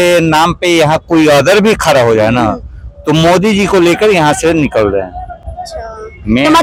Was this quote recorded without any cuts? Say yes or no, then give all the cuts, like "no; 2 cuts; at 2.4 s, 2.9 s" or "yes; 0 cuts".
yes; 0 cuts